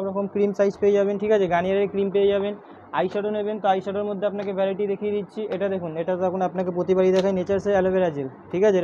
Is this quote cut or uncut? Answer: uncut